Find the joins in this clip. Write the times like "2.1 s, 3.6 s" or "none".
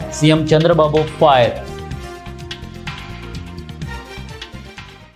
none